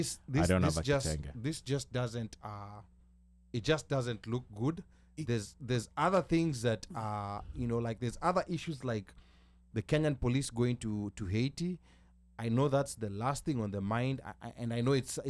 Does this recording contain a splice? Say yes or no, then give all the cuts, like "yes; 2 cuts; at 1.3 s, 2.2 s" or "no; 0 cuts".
no; 0 cuts